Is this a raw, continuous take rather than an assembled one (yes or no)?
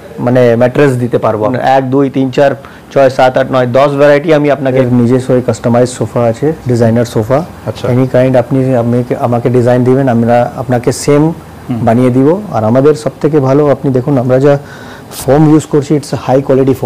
no